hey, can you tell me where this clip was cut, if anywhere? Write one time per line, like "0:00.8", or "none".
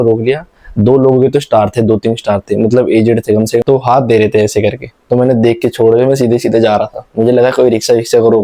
0:03.4